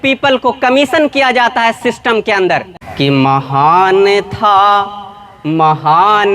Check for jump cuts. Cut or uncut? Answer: cut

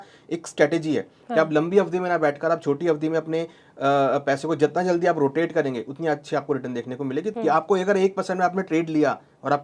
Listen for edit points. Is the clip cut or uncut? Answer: cut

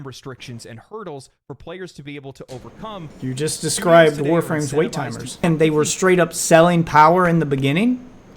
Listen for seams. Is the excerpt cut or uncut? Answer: cut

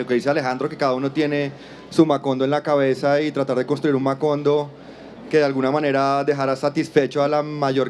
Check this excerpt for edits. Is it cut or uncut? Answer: cut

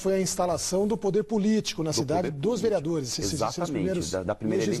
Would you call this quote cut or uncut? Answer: cut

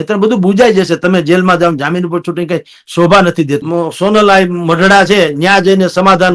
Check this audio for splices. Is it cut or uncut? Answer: cut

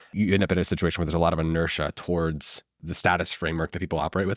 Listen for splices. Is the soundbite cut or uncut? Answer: cut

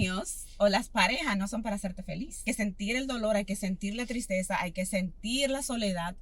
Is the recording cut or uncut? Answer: cut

